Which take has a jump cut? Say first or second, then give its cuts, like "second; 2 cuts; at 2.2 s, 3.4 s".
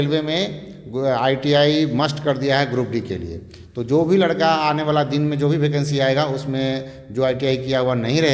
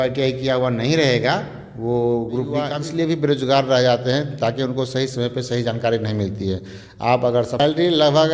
second; 2 cuts; at 2.7 s, 7.6 s